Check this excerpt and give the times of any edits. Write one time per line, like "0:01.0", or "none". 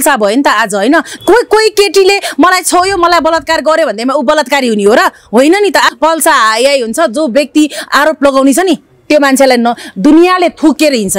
0:01.1
0:05.9